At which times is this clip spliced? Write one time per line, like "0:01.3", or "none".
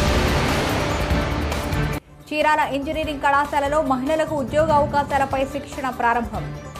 0:01.8